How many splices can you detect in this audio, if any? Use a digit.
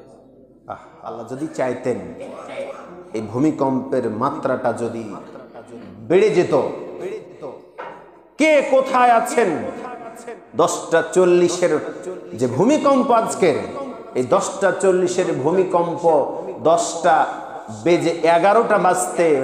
1